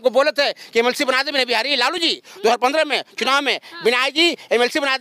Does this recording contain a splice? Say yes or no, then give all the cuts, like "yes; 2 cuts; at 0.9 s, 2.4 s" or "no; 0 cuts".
no; 0 cuts